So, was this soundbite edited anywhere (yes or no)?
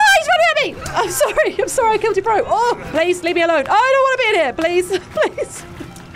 yes